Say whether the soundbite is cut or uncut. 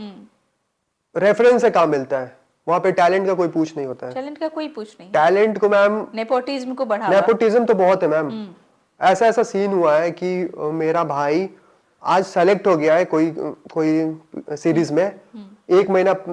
uncut